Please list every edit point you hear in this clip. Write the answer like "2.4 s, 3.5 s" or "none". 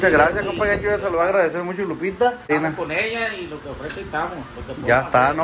2.5 s

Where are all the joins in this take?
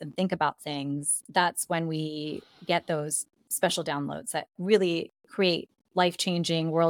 1.1 s

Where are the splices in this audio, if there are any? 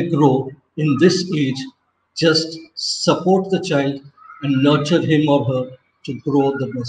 none

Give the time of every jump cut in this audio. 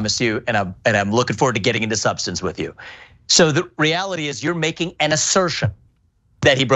2.8 s

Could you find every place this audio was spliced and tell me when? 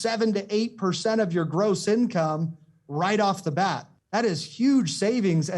3.9 s

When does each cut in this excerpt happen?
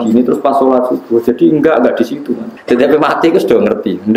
2.5 s

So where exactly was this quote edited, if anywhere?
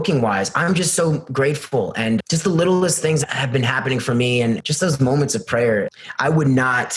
2.2 s, 3.2 s, 4.6 s, 5.9 s

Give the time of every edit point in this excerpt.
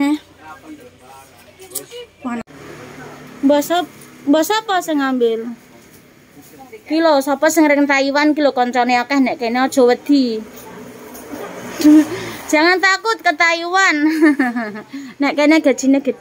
2.5 s

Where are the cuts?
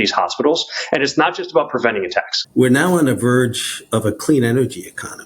2.4 s

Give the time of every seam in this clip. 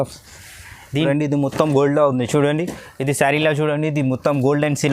1.0 s

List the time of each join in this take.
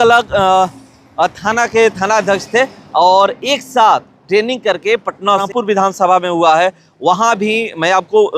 5.5 s

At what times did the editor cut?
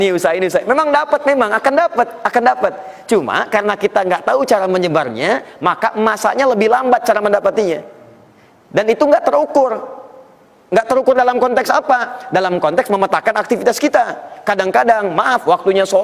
none

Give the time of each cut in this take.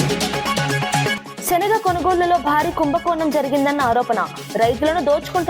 1.3 s

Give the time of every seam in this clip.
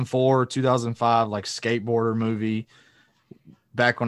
none

